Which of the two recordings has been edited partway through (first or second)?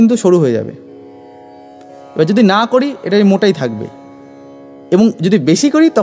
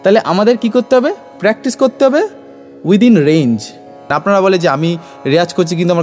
second